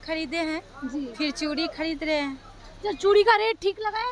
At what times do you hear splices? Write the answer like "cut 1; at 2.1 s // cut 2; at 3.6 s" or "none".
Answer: none